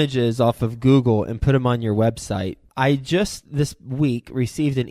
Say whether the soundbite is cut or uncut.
cut